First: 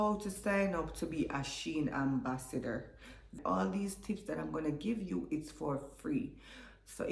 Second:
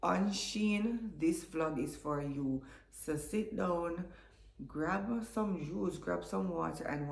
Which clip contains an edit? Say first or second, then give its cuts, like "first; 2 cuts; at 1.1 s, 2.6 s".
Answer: first; 1 cut; at 3.4 s